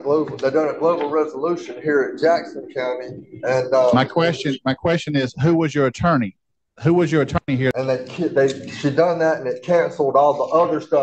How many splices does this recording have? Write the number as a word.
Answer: one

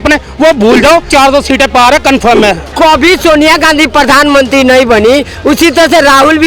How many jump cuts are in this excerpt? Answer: two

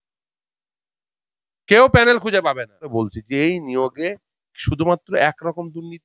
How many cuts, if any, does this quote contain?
one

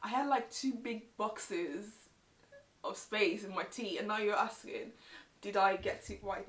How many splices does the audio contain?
zero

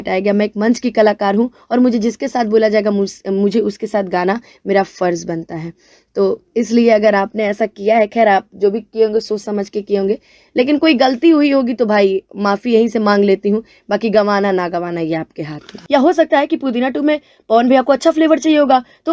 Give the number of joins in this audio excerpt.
one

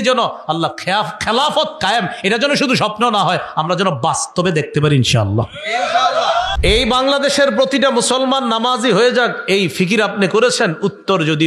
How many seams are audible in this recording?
one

